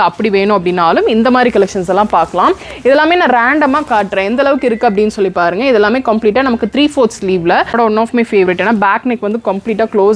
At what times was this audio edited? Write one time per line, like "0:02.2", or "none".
0:07.7